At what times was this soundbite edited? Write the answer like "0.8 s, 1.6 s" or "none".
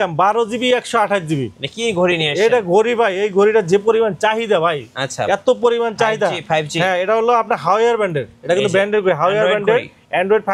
none